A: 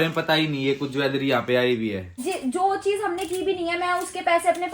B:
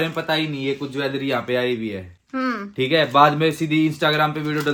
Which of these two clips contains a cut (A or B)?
A